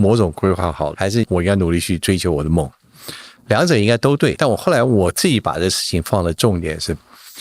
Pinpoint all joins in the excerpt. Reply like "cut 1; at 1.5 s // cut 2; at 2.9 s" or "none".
cut 1; at 1.1 s // cut 2; at 4.4 s